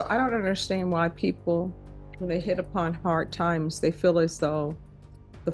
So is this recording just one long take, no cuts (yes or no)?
yes